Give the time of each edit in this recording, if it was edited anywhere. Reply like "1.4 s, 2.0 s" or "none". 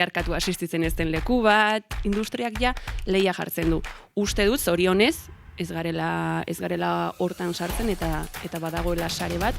1.9 s